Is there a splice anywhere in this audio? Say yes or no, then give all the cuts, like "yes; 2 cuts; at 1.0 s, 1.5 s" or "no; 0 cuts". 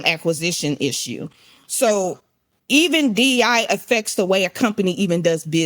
no; 0 cuts